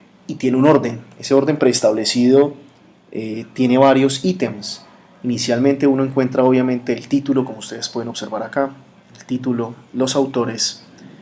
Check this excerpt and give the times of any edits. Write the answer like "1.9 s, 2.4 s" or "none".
none